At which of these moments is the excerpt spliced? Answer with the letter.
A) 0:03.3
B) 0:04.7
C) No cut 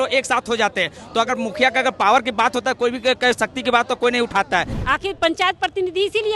B